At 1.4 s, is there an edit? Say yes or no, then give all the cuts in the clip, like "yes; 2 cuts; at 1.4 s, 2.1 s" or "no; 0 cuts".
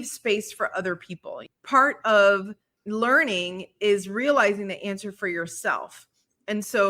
yes; 1 cut; at 1.4 s